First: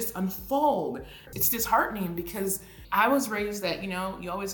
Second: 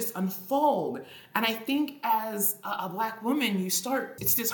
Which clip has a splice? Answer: first; 1 cut; at 1.3 s

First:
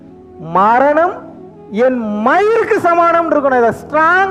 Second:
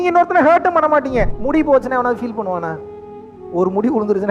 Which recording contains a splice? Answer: second; 1 cut; at 1.3 s

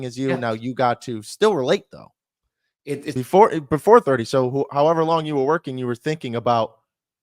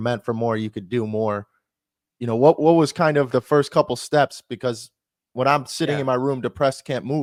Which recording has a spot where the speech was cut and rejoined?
first; 1 cut; at 3.1 s

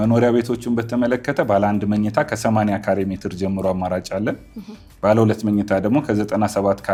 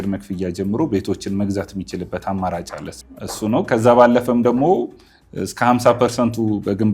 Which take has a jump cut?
second; 1 cut; at 2.9 s

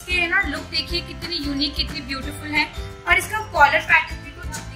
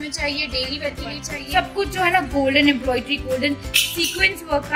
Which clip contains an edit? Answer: second; 1 cut; at 1.3 s

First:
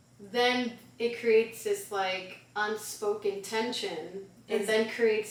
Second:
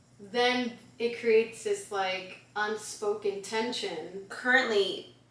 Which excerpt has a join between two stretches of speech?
second; 1 cut; at 4.4 s

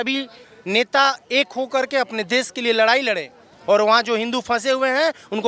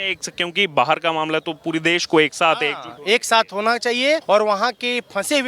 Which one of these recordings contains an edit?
second; 1 cut; at 4.2 s

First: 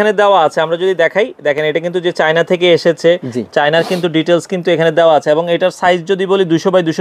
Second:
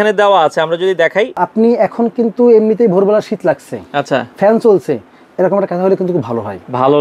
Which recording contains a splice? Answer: second; 1 cut; at 1.4 s

